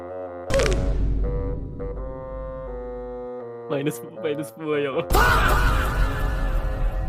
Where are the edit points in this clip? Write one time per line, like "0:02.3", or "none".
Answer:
none